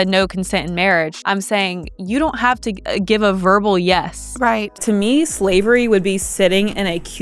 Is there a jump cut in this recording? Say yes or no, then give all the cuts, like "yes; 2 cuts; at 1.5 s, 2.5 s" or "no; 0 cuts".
yes; 3 cuts; at 1.2 s, 2.8 s, 4.8 s